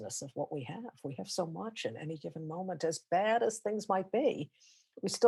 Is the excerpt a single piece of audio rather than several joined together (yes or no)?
yes